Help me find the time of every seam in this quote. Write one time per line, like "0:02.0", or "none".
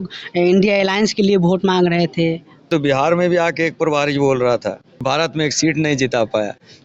0:02.6
0:05.0